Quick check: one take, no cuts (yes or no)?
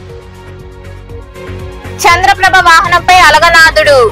yes